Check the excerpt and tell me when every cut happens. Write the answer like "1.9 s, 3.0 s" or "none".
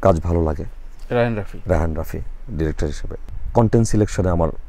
3.3 s

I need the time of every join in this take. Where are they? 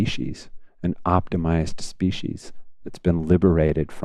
none

